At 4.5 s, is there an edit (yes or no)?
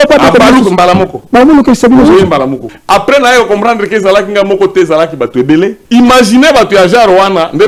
no